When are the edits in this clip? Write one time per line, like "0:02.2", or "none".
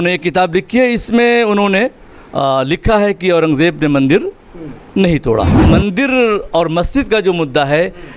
0:05.6